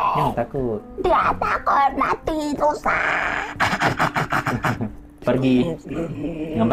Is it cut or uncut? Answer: cut